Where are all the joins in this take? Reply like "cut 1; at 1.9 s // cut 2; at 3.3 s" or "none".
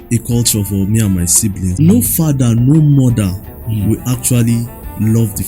cut 1; at 1.7 s